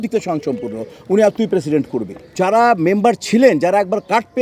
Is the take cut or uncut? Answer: cut